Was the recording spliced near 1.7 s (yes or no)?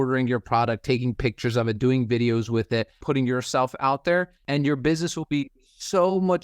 no